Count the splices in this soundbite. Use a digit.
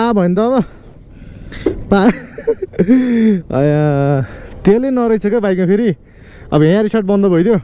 0